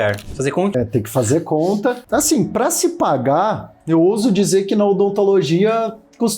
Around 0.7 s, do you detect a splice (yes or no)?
yes